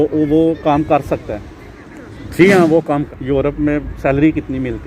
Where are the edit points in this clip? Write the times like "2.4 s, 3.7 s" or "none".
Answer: 2.9 s